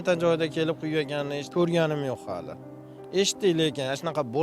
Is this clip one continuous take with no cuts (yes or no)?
no